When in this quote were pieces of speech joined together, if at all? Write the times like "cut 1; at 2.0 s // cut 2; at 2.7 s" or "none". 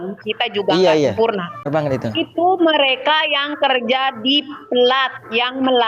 cut 1; at 1.7 s

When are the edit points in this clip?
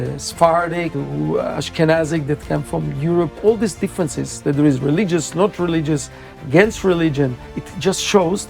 cut 1; at 1.0 s // cut 2; at 3.3 s

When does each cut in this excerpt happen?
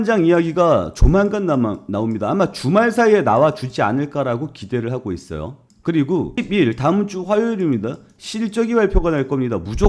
none

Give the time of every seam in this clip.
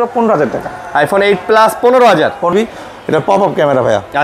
cut 1; at 2.5 s

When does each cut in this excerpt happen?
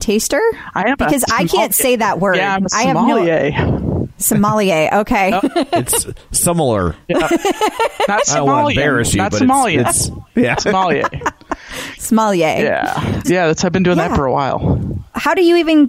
none

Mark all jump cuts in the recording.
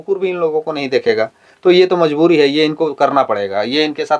none

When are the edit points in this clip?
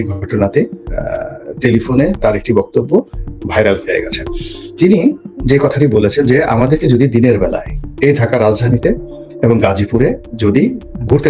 none

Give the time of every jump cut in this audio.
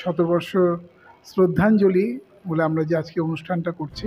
none

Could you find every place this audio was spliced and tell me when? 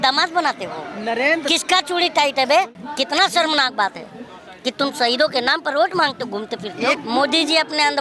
cut 1; at 2.8 s // cut 2; at 7.0 s

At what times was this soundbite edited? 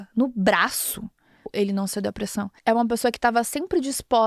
cut 1; at 1.4 s // cut 2; at 2.5 s

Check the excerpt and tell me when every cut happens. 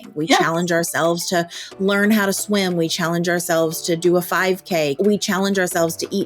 cut 1; at 5.0 s

